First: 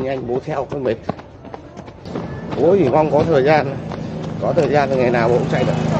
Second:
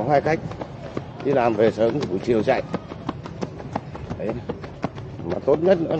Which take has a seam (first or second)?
first